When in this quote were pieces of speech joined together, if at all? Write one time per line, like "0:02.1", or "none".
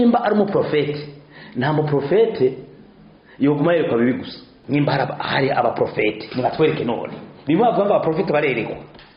0:04.6